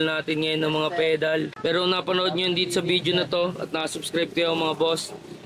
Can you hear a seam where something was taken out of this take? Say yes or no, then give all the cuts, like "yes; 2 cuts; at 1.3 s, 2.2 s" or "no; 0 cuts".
yes; 1 cut; at 1.6 s